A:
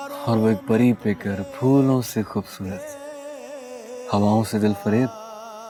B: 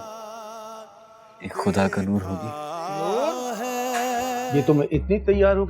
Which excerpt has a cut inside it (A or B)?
B